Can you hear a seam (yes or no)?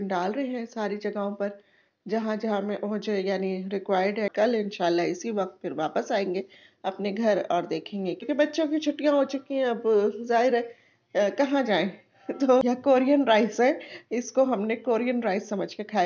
yes